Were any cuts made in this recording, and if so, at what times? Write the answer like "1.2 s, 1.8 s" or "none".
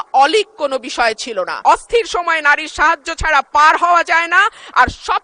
1.5 s